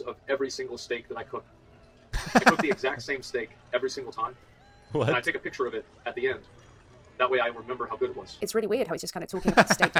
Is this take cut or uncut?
uncut